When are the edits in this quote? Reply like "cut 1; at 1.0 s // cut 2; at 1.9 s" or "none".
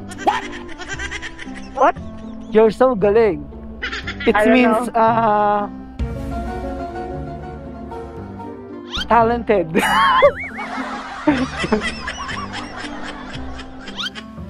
none